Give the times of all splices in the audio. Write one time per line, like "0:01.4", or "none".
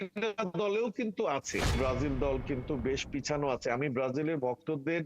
0:01.8

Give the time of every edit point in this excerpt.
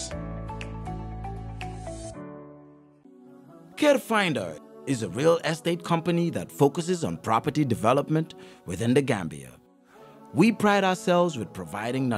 0:03.0

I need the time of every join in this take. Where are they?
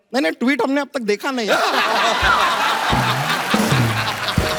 none

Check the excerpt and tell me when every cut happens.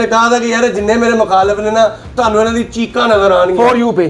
none

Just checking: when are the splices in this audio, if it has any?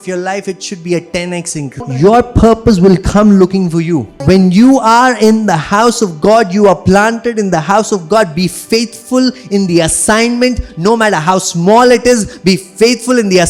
0:01.8
0:04.1

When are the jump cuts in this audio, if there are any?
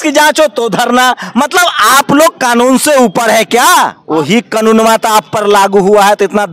0:04.0

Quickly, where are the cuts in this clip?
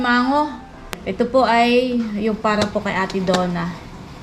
0:01.0

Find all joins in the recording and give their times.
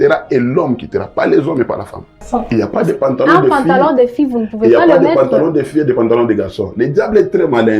0:02.2

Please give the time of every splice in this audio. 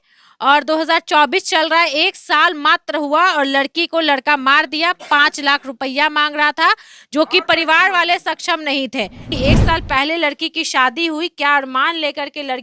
0:09.3

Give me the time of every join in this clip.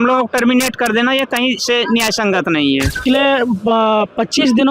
0:03.0

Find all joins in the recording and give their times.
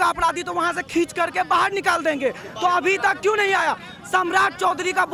none

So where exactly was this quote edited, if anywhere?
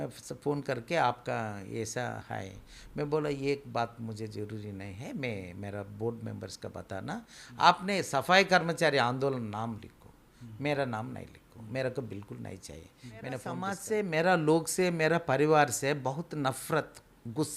0:13.7

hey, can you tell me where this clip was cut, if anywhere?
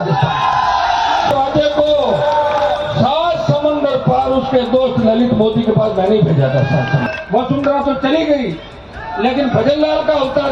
0:01.3
0:07.0

